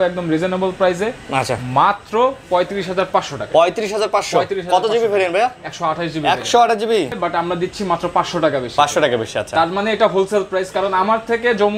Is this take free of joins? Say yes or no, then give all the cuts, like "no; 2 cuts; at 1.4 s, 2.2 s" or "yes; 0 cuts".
no; 1 cut; at 7.1 s